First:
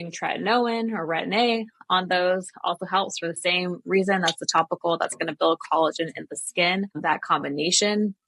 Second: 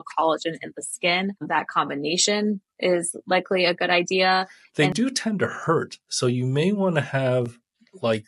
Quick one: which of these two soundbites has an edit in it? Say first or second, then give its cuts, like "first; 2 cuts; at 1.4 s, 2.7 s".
second; 1 cut; at 4.6 s